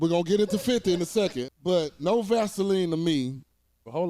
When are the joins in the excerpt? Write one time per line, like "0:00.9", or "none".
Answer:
0:01.5